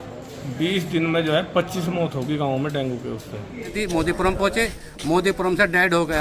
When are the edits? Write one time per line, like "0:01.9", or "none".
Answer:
0:03.7